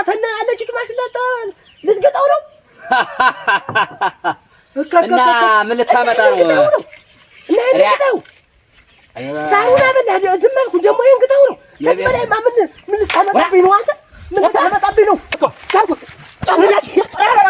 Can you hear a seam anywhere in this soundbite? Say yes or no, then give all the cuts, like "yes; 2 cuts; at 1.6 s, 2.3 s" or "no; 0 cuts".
yes; 1 cut; at 15.4 s